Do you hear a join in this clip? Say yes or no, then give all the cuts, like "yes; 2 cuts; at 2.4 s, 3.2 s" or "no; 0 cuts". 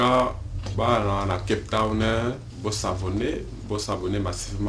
no; 0 cuts